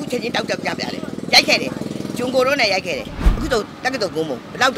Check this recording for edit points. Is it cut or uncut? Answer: cut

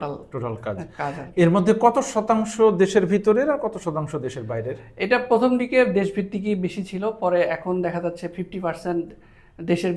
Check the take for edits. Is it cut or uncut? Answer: uncut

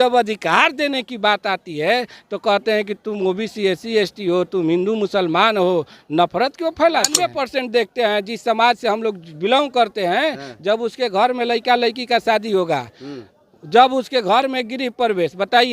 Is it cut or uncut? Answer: cut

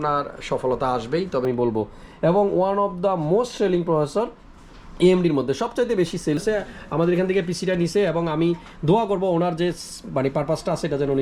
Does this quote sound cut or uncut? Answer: cut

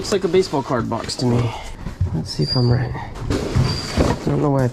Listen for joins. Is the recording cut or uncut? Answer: uncut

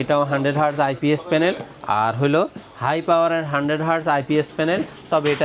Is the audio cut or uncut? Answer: uncut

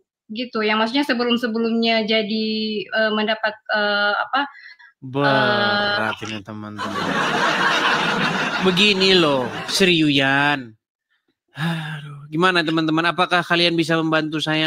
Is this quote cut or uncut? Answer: uncut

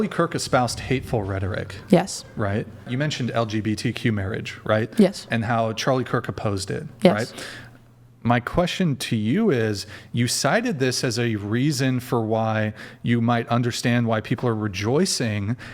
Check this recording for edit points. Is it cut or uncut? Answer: cut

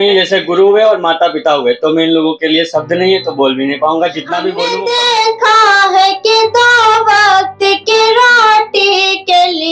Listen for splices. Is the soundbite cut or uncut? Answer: cut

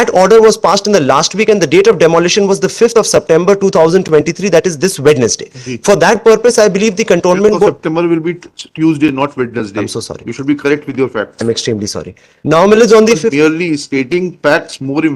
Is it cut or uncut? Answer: uncut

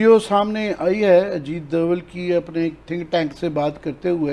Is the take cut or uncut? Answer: uncut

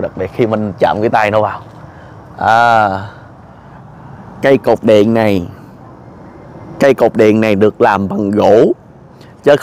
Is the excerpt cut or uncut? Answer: uncut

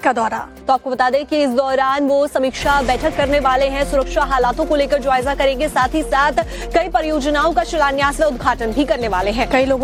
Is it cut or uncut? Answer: uncut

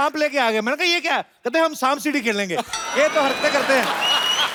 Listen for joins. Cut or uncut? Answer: uncut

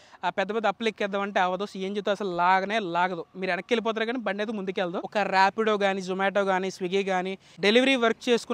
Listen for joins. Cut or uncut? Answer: cut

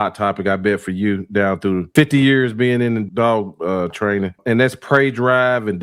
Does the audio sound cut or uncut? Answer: cut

